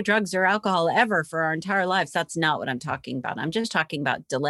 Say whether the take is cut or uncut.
uncut